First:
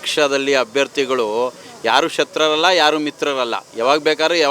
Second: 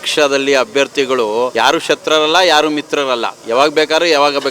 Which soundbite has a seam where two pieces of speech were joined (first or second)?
second